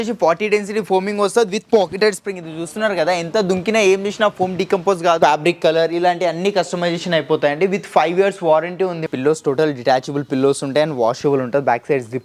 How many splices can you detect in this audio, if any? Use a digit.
2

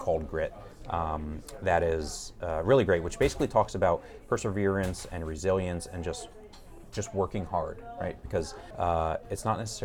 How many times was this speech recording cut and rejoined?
1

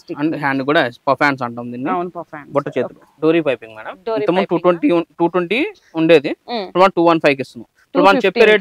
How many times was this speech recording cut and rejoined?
1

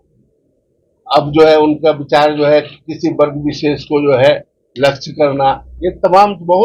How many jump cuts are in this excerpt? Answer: 0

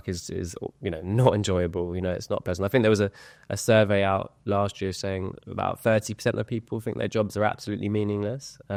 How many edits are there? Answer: 0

